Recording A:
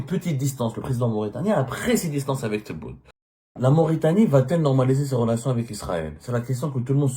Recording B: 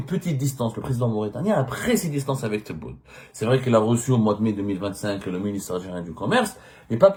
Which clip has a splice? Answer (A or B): A